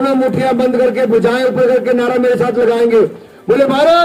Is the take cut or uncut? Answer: uncut